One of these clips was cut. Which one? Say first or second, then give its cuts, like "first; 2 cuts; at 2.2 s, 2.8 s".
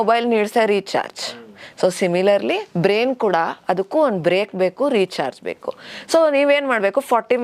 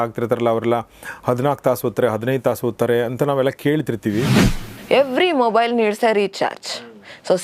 second; 1 cut; at 4.4 s